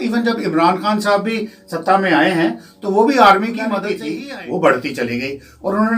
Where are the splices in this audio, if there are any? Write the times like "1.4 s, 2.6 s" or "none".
4.0 s

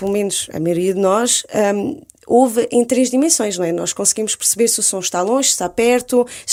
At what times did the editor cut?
none

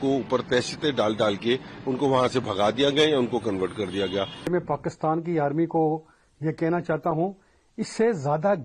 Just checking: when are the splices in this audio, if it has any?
4.5 s

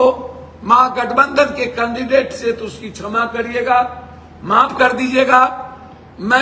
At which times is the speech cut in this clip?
none

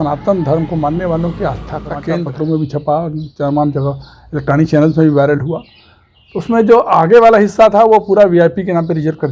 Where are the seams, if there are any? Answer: 1.9 s

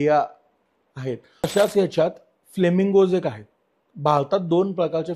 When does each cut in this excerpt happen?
1.5 s

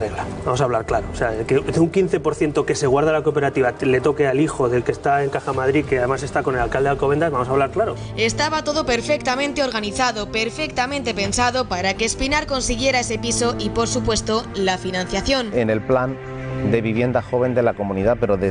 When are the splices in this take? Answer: none

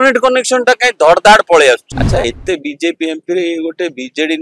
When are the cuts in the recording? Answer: 1.9 s

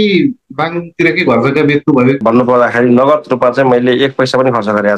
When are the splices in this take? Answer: 2.2 s

